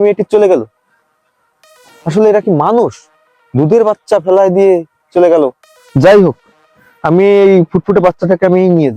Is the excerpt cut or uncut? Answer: uncut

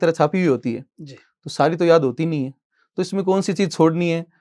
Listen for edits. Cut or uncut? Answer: uncut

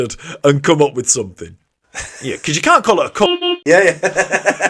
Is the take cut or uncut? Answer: uncut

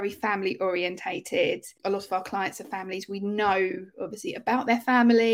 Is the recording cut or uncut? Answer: cut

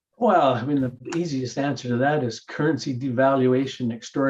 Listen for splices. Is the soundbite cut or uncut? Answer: cut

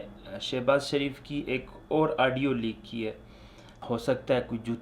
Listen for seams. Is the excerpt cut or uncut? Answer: cut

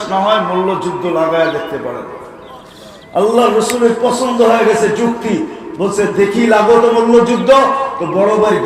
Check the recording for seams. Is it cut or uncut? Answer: uncut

